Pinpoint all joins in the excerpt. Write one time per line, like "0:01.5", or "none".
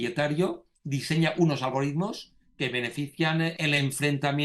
0:03.6